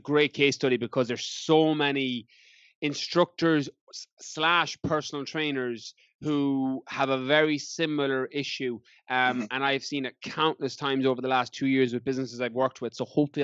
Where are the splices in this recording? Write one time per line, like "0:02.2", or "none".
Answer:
none